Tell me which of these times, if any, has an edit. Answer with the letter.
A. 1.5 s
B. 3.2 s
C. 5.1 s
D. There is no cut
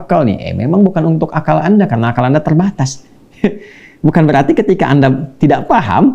D